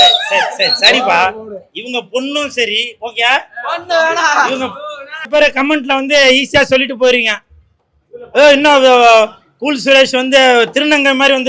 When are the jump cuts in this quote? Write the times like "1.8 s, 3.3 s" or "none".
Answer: 5.3 s